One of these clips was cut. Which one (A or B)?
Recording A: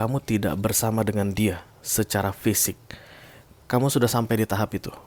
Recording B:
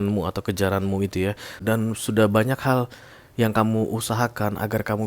B